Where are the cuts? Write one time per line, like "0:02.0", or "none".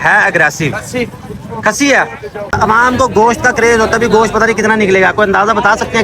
0:02.5